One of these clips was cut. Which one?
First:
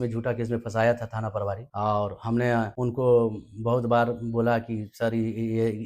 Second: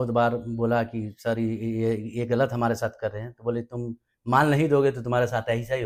first; 2 cuts; at 1.7 s, 2.7 s

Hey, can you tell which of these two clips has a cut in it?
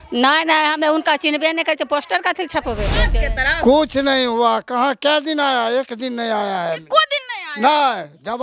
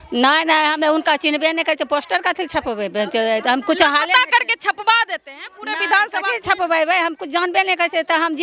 first; 1 cut; at 3.1 s

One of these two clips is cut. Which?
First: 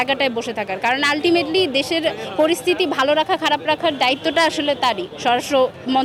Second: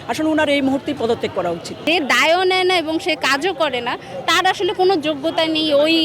second; 1 cut; at 1.8 s

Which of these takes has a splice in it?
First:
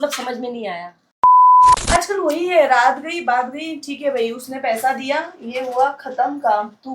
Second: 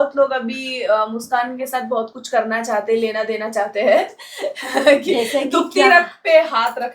first; 1 cut; at 1.8 s

